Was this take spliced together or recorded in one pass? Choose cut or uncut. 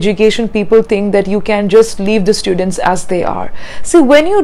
uncut